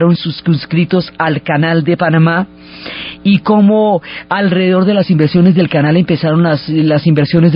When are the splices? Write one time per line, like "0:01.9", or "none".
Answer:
0:02.4